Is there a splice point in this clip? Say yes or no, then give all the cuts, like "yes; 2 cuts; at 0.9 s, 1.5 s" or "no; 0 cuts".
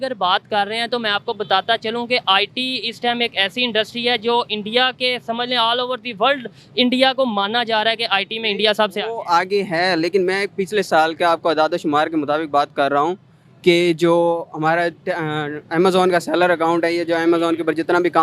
no; 0 cuts